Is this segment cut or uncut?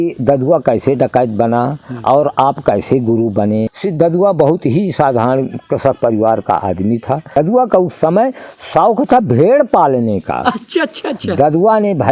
cut